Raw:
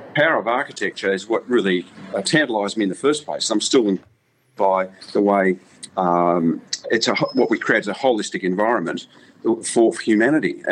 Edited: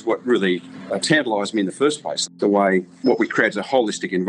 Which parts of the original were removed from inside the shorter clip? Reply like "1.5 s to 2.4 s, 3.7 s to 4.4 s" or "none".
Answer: 3.4 s to 4.9 s, 5.7 s to 7.3 s